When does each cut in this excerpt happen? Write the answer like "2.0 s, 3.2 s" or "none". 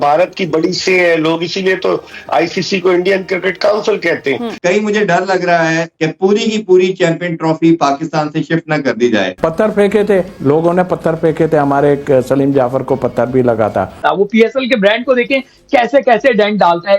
4.6 s, 6.0 s, 9.3 s, 14.0 s